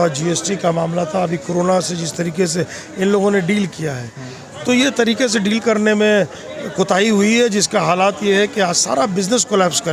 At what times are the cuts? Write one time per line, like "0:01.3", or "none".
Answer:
none